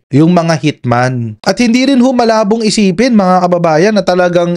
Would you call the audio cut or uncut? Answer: cut